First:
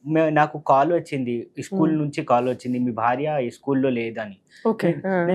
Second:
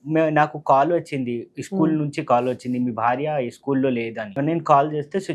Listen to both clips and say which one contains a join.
second; 1 cut; at 4.3 s

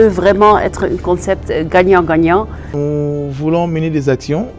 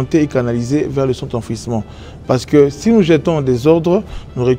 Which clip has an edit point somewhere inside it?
first; 1 cut; at 2.7 s

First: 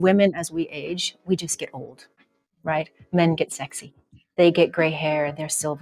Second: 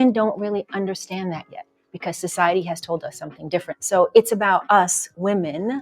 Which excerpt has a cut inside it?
second; 2 cuts; at 1.5 s, 3.7 s

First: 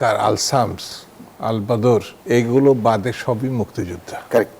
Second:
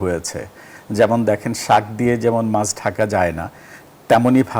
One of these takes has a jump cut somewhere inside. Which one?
first; 1 cut; at 2.1 s

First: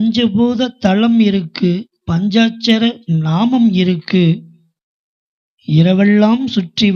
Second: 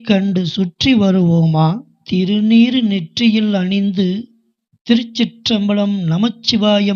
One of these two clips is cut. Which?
second; 1 cut; at 1.9 s

